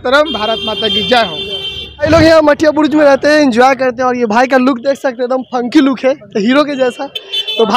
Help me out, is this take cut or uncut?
uncut